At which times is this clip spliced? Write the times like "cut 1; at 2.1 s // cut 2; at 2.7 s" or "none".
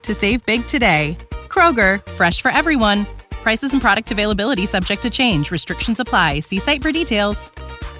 none